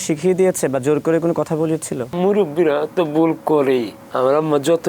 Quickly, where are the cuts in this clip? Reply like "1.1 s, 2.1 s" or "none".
2.1 s, 4.0 s